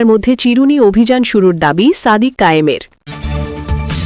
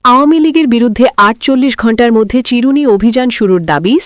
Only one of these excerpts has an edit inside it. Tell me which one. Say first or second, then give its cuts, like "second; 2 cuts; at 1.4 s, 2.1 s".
first; 1 cut; at 2.9 s